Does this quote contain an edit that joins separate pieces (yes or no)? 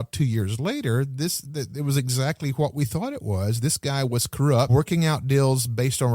yes